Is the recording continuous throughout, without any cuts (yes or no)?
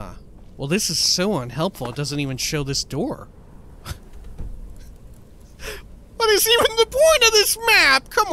no